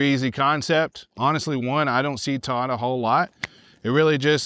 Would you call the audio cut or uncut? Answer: cut